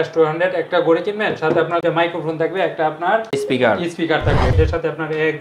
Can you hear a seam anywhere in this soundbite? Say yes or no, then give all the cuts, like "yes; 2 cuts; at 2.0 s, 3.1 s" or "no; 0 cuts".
yes; 2 cuts; at 1.8 s, 4.5 s